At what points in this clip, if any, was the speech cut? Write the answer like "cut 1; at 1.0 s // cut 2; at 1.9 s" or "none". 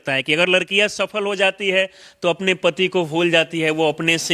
none